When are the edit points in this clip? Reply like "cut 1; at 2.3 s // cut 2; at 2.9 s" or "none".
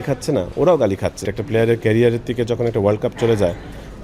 cut 1; at 1.3 s